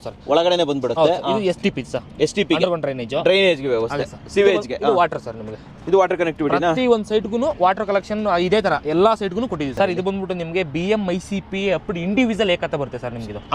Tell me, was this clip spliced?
yes; 1 cut; at 9.7 s

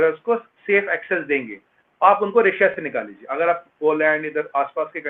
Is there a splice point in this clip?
no; 0 cuts

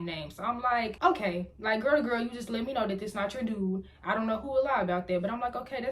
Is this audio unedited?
yes; 0 cuts

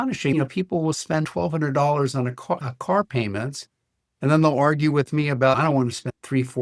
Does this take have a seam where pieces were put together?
no; 0 cuts

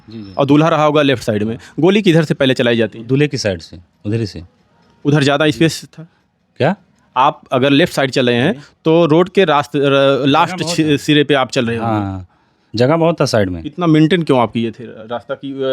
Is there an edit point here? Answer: no; 0 cuts

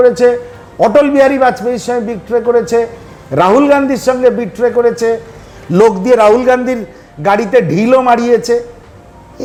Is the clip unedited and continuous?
yes; 0 cuts

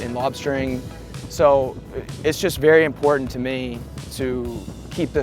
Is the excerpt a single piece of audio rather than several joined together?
no; 1 cut; at 1.0 s

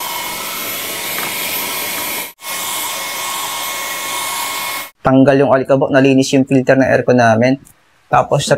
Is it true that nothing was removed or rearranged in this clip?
no; 1 cut; at 2.3 s

